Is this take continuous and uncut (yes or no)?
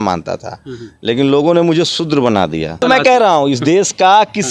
no